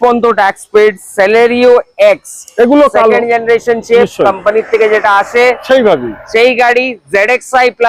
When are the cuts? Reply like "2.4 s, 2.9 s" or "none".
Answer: none